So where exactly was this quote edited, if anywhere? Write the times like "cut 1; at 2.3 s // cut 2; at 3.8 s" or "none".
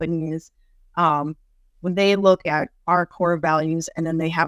none